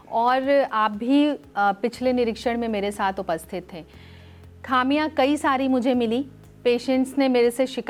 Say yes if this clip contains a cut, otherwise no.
no